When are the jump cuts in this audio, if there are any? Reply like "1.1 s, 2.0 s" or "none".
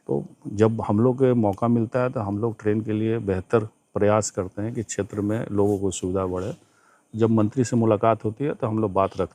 none